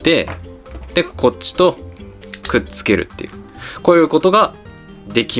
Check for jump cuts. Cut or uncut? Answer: uncut